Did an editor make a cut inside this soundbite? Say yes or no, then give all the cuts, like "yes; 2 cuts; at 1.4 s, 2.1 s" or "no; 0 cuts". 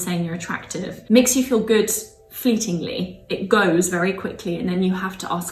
yes; 1 cut; at 1.0 s